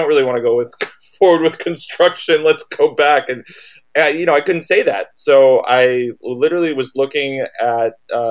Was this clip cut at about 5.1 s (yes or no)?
no